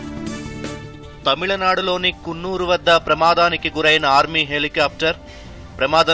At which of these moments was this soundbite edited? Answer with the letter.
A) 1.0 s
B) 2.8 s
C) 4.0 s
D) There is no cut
A